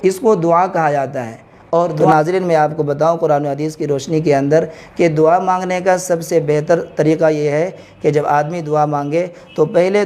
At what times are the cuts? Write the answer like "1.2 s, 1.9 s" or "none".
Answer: 2.0 s

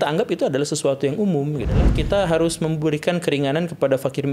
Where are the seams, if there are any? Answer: 2.0 s

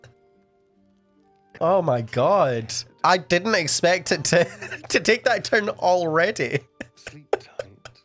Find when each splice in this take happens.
1.5 s

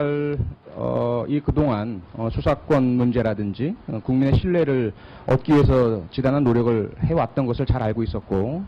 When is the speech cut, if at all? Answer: 2.8 s

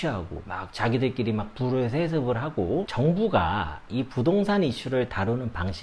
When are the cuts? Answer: 2.9 s

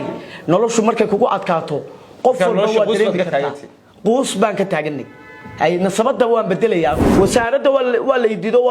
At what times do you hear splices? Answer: 7.1 s

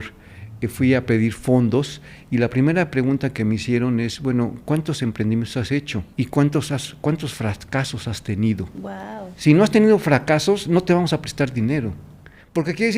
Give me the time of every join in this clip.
6.1 s

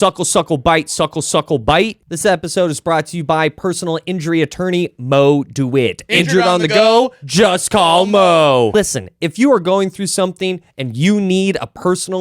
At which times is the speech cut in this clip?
2.0 s

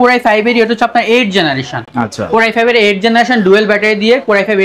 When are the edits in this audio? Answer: none

